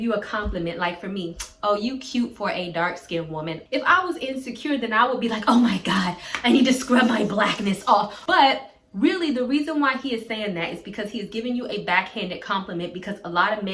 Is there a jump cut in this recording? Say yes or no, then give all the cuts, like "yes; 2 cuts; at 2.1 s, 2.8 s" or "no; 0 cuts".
yes; 2 cuts; at 3.6 s, 8.2 s